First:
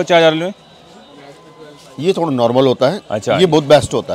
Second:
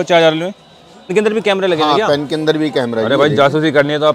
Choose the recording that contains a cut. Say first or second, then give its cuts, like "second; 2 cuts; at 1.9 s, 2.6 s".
second; 1 cut; at 1.1 s